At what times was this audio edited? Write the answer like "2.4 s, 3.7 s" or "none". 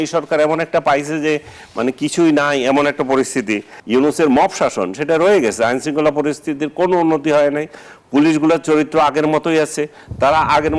3.7 s